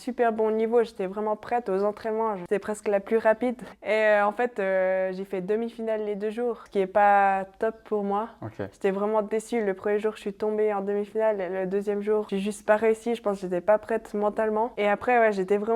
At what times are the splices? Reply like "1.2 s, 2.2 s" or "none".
2.4 s, 3.7 s, 6.6 s, 12.3 s, 14.7 s